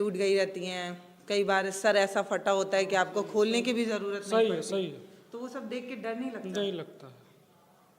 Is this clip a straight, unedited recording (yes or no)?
yes